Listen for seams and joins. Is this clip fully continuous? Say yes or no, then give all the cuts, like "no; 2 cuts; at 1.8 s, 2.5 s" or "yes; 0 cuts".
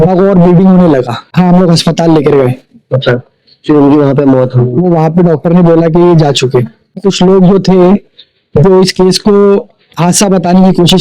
no; 2 cuts; at 1.3 s, 7.0 s